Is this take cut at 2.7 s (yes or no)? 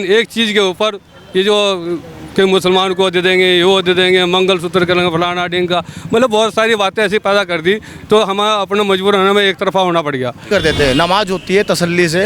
no